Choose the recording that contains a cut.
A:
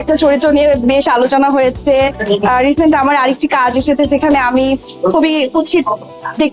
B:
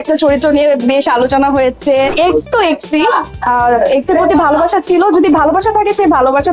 B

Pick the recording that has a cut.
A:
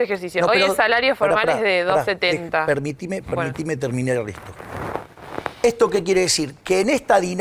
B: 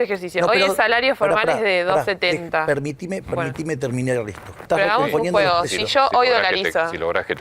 B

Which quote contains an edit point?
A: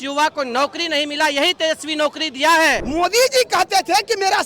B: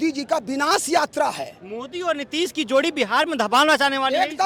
A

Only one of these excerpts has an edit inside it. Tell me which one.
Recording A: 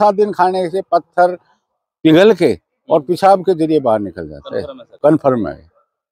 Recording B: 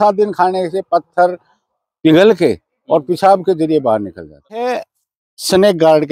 B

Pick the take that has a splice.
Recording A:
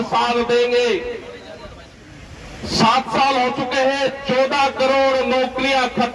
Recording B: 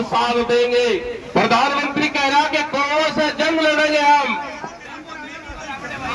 B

